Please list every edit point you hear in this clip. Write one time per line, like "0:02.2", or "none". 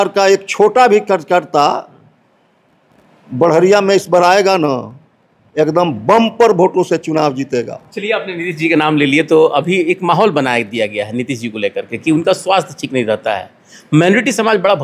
none